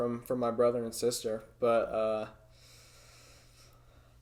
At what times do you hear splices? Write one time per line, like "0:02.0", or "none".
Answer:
none

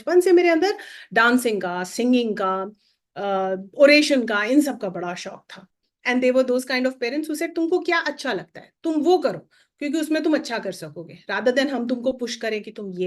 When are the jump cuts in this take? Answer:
0:05.8

